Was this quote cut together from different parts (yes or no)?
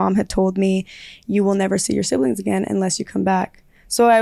no